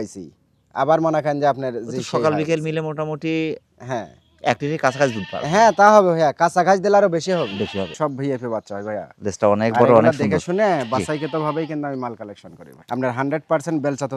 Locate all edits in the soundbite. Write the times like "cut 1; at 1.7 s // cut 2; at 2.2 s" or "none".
cut 1; at 7.9 s // cut 2; at 12.8 s